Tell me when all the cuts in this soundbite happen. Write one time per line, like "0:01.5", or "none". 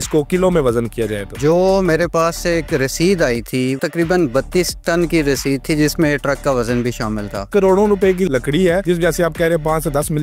0:01.3
0:03.8
0:07.5